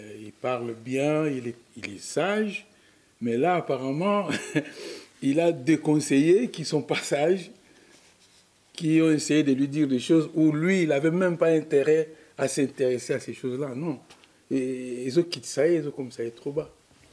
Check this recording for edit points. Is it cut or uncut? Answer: uncut